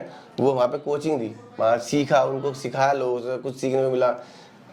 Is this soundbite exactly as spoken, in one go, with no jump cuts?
yes; 0 cuts

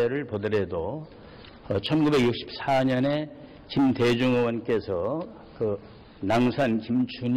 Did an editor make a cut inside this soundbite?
yes; 1 cut; at 5.9 s

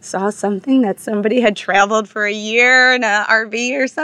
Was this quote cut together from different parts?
no; 0 cuts

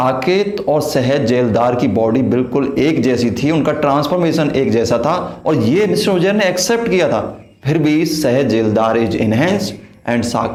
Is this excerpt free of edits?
yes; 0 cuts

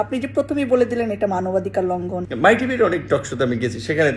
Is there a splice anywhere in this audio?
yes; 1 cut; at 2.2 s

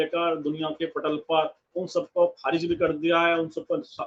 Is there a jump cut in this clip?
no; 0 cuts

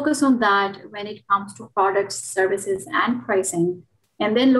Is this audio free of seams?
yes; 0 cuts

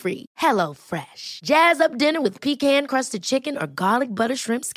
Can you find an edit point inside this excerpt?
no; 0 cuts

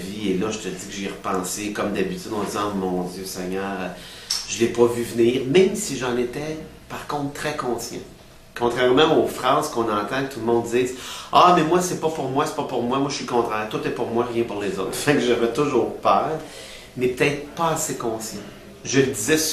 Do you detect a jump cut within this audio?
yes; 1 cut; at 16.5 s

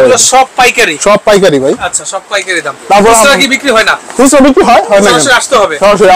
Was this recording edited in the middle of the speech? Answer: no; 0 cuts

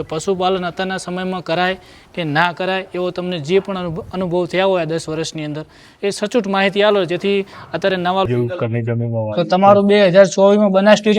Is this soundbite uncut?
no; 1 cut; at 8.3 s

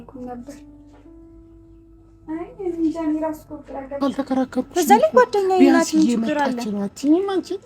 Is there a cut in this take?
yes; 1 cut; at 4.0 s

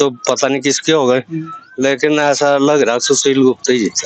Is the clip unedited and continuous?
yes; 0 cuts

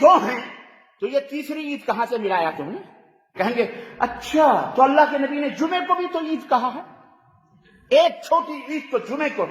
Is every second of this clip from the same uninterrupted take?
no; 1 cut; at 3.3 s

